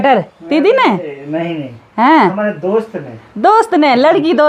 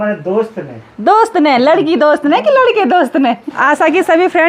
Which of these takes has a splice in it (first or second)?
second